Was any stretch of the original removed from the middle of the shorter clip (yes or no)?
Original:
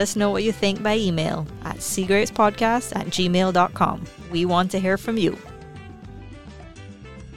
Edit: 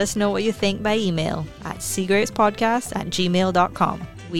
no